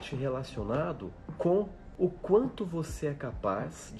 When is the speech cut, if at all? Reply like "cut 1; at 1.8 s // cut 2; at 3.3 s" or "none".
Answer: cut 1; at 1.2 s // cut 2; at 1.8 s

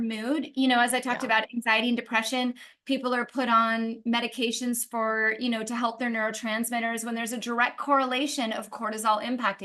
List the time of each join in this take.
none

